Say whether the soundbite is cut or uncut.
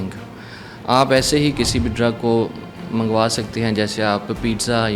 uncut